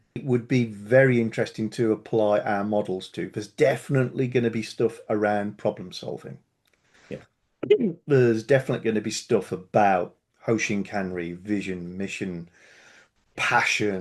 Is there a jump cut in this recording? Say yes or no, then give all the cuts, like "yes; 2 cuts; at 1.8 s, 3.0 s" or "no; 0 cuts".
no; 0 cuts